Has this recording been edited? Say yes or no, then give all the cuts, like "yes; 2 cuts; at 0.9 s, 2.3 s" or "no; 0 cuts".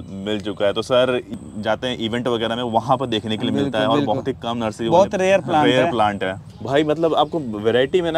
yes; 2 cuts; at 1.4 s, 6.5 s